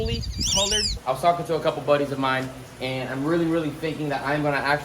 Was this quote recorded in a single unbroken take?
no; 1 cut; at 0.9 s

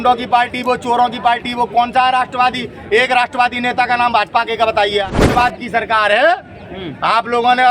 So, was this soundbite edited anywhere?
yes; 1 cut; at 5.2 s

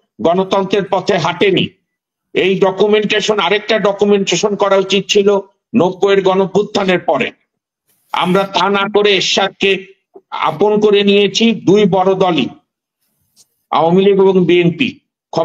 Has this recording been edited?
no; 0 cuts

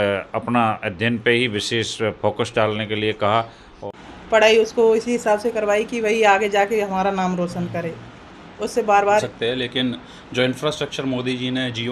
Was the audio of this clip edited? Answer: yes; 2 cuts; at 3.7 s, 9.2 s

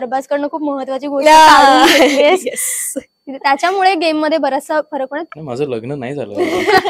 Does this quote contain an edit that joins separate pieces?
yes; 1 cut; at 5.3 s

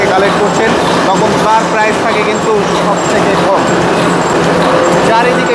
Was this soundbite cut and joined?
no; 0 cuts

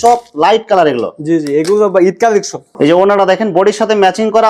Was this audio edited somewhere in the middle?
yes; 1 cut; at 2.6 s

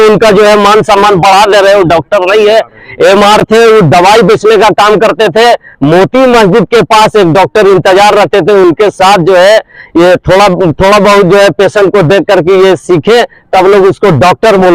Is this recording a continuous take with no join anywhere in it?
yes; 0 cuts

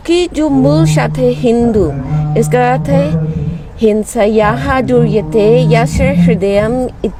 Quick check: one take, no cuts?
yes; 0 cuts

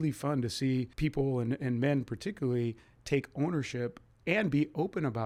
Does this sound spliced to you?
no; 0 cuts

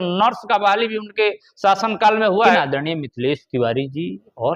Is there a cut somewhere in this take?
yes; 1 cut; at 2.6 s

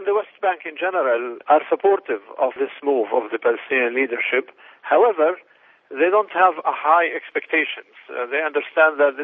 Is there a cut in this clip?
no; 0 cuts

